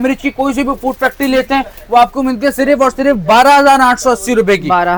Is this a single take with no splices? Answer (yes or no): yes